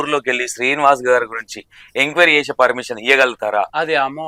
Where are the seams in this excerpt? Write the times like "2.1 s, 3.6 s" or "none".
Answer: none